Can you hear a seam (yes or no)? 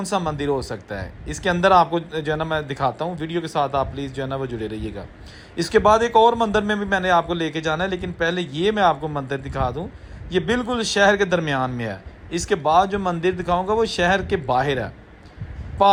no